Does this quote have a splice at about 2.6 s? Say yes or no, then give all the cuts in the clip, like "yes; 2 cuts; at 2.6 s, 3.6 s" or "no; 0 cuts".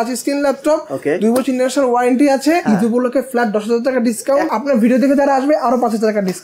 yes; 2 cuts; at 2.6 s, 4.5 s